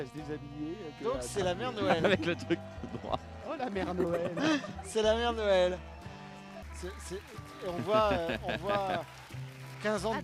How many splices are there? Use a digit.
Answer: 1